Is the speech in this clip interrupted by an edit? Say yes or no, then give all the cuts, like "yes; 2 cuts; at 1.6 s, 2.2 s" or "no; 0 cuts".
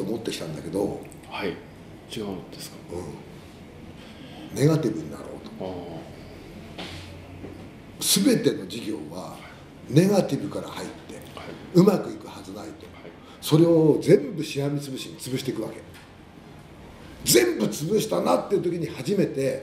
no; 0 cuts